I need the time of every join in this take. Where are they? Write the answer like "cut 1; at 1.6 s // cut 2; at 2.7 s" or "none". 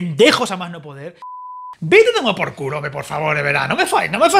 cut 1; at 1.6 s